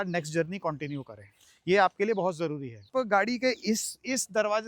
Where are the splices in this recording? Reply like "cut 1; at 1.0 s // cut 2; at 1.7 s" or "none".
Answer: cut 1; at 2.9 s